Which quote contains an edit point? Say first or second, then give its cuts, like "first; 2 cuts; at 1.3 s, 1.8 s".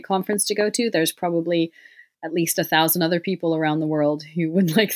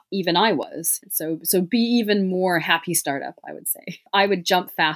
second; 2 cuts; at 0.9 s, 4.0 s